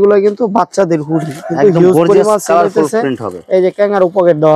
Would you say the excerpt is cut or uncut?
uncut